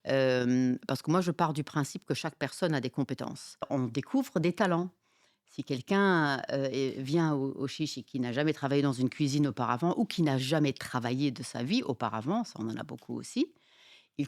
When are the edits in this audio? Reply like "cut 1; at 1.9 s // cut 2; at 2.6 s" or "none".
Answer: cut 1; at 3.7 s